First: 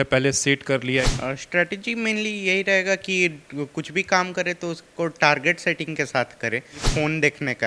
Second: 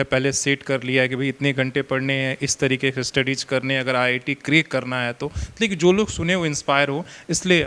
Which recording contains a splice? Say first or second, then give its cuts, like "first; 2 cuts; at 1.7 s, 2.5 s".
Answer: first; 2 cuts; at 1.1 s, 6.9 s